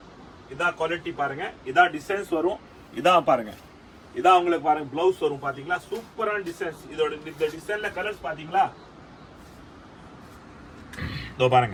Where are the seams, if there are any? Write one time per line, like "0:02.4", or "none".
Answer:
none